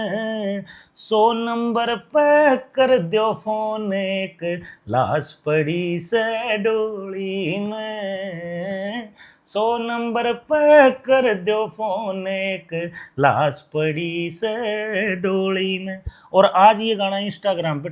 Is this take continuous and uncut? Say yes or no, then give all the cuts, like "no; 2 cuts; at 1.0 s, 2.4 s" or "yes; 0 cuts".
yes; 0 cuts